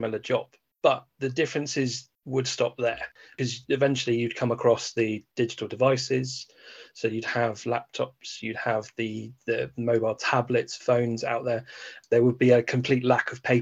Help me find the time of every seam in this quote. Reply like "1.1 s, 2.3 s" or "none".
3.3 s, 11.9 s